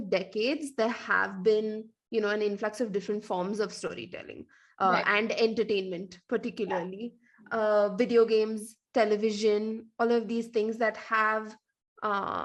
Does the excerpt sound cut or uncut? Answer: uncut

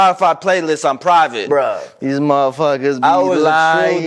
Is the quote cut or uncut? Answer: cut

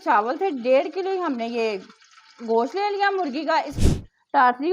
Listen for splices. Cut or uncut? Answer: cut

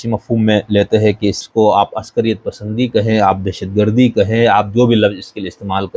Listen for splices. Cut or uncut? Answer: cut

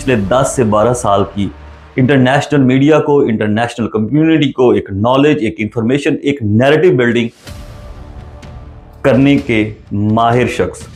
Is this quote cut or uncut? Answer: uncut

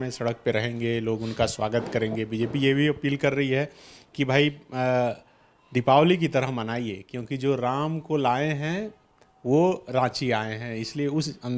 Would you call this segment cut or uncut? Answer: uncut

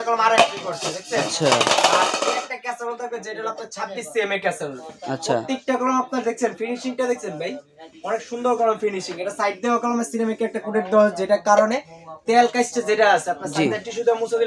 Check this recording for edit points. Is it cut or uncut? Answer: uncut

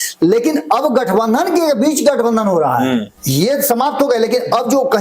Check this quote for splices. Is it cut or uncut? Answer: cut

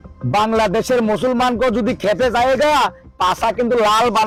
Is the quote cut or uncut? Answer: uncut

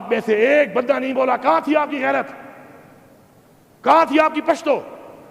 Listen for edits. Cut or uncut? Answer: uncut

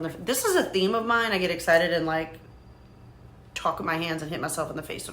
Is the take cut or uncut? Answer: uncut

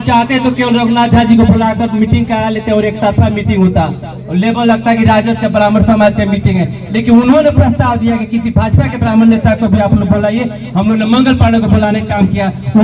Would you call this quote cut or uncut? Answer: uncut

